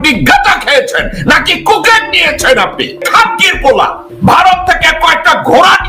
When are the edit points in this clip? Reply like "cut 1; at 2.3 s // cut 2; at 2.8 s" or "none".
cut 1; at 3.0 s // cut 2; at 4.1 s